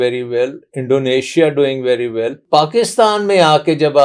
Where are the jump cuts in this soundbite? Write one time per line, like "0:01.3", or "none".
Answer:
0:02.4